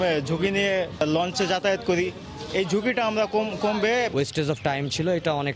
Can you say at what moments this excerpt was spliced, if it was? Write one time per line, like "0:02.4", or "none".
0:01.0
0:04.1